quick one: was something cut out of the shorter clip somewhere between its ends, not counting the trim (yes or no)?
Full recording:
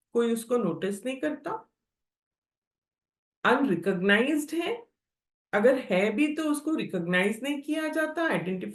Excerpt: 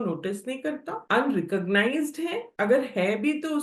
yes